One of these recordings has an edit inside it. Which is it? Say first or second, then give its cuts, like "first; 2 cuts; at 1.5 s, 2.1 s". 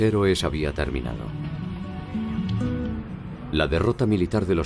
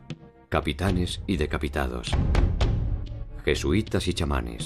first; 1 cut; at 1.6 s